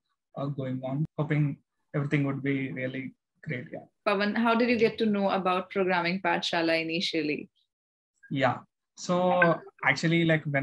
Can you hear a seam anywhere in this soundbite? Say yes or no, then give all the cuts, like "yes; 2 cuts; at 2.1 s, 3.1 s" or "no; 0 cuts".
no; 0 cuts